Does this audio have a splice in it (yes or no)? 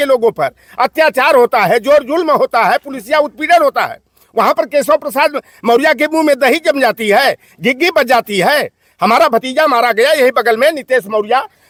no